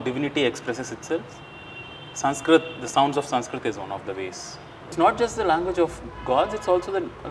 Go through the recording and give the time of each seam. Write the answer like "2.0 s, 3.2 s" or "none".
4.9 s